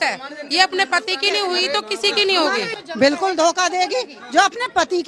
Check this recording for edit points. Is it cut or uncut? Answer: cut